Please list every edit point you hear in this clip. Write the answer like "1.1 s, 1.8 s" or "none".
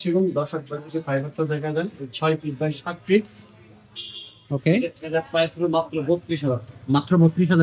none